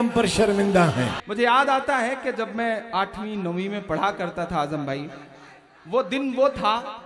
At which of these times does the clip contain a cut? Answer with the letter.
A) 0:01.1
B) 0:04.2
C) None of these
A